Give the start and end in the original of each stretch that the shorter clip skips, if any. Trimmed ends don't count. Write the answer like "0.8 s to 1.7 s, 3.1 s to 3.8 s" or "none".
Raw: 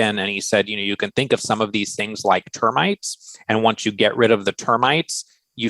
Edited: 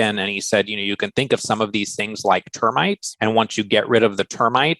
3.1 s to 3.4 s